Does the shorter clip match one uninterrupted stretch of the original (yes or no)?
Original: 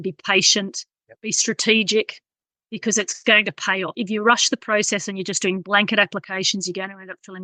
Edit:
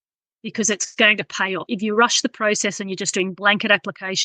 yes